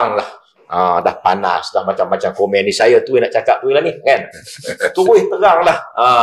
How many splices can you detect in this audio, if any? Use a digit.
0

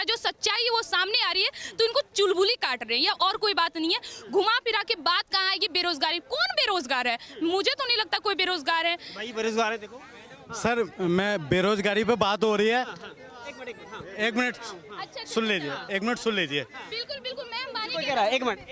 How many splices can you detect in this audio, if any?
0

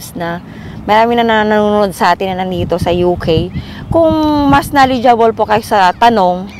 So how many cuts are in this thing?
0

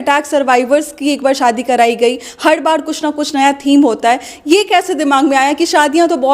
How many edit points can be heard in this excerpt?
0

